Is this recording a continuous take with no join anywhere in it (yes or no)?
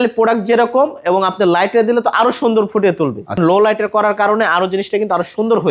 no